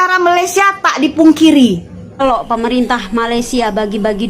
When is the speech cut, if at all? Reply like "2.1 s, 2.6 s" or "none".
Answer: 2.2 s